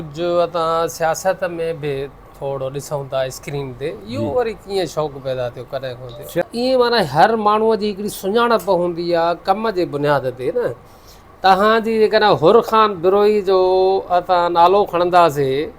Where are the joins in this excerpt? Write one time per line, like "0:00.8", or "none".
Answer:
0:06.4